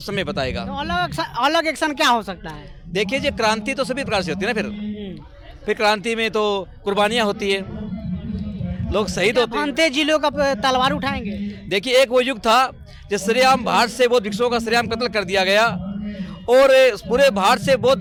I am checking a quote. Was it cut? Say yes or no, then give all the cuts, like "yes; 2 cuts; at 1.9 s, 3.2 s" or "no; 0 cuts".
no; 0 cuts